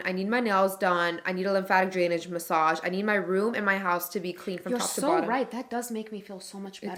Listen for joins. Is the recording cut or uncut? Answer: uncut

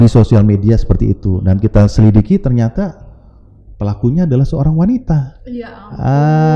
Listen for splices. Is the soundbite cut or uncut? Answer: uncut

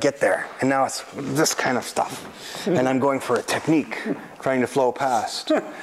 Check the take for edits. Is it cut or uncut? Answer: uncut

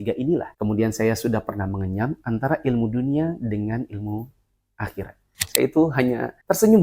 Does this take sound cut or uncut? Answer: cut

